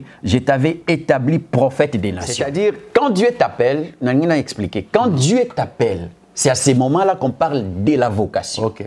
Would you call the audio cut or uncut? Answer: cut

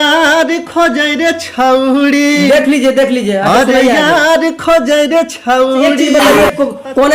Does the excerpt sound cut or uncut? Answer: cut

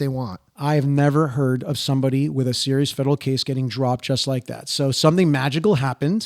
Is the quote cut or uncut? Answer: uncut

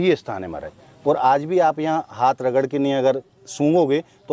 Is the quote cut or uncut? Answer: uncut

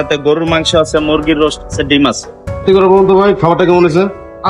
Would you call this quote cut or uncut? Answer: cut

